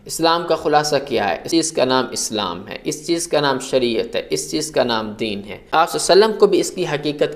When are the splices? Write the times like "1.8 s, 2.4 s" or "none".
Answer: 1.4 s, 5.7 s